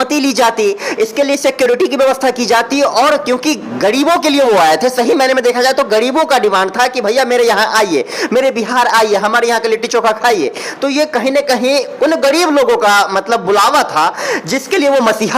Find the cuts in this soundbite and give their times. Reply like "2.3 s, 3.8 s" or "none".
none